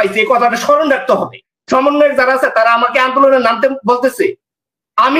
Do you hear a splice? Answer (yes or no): yes